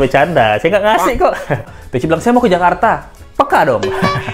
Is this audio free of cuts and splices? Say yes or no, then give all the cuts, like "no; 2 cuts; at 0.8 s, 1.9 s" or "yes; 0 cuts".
no; 1 cut; at 1.7 s